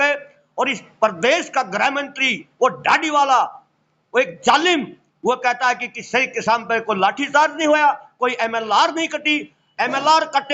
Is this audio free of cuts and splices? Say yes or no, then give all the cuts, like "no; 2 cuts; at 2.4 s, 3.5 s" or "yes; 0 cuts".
yes; 0 cuts